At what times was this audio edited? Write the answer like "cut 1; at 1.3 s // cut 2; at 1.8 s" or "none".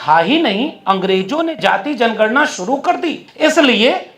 cut 1; at 3.2 s

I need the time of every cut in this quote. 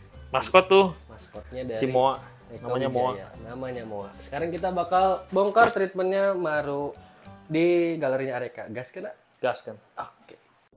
none

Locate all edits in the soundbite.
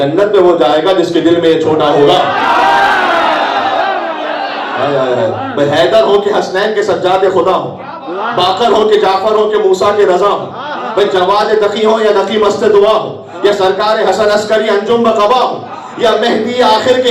cut 1; at 4.6 s

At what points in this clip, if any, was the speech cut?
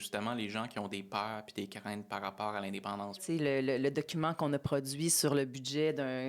cut 1; at 3.2 s

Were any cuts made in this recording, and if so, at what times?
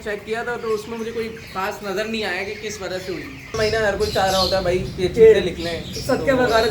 cut 1; at 3.6 s

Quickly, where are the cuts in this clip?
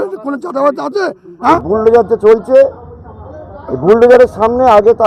cut 1; at 1.4 s

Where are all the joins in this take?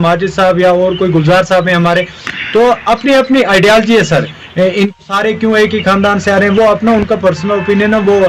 cut 1; at 5.0 s

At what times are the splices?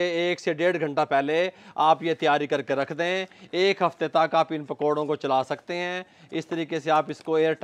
none

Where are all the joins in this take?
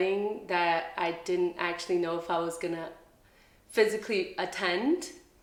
none

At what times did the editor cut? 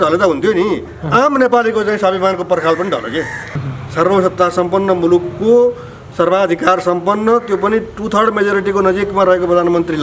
cut 1; at 3.5 s

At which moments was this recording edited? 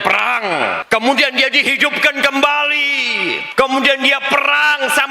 cut 1; at 0.8 s // cut 2; at 3.4 s

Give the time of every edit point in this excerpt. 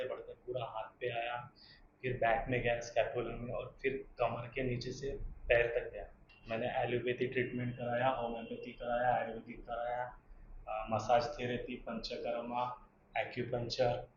none

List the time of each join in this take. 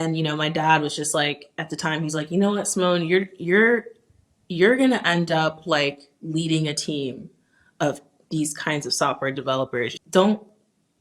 cut 1; at 9.9 s

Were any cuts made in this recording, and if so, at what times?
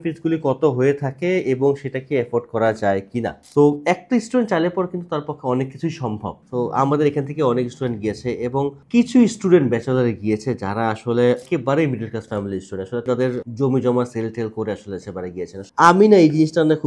cut 1; at 3.4 s // cut 2; at 6.3 s // cut 3; at 11.4 s // cut 4; at 13.0 s // cut 5; at 15.7 s

